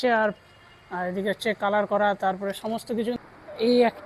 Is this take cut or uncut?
cut